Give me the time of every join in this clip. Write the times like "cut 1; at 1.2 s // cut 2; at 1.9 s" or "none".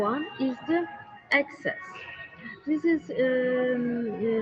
cut 1; at 2.8 s